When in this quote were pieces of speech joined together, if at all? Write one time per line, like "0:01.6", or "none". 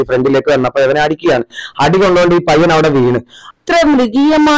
0:03.5